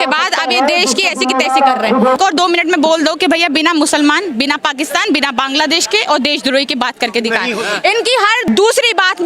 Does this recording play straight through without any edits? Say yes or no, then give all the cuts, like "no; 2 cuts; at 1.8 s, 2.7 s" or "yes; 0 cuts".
no; 1 cut; at 2.2 s